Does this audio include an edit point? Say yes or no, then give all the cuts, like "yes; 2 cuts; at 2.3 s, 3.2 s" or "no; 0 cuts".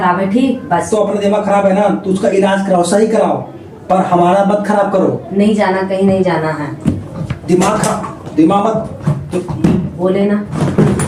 no; 0 cuts